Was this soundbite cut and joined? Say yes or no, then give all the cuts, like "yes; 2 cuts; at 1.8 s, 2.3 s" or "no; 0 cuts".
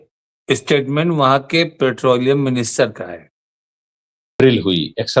yes; 1 cut; at 4.2 s